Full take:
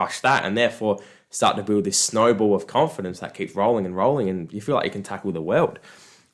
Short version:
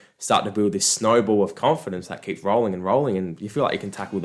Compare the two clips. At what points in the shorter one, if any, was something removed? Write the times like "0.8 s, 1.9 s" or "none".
none